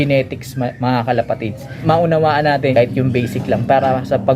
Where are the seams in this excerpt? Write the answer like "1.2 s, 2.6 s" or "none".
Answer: 1.6 s, 2.7 s